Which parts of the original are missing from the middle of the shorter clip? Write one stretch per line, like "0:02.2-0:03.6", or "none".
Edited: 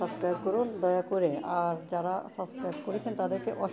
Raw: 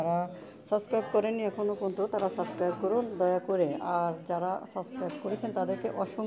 none